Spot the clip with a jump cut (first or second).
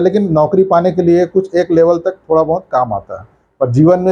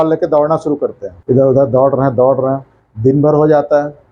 second